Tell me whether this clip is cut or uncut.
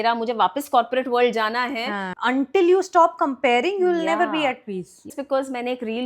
cut